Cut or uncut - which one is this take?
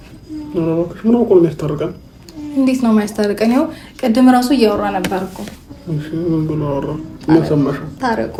uncut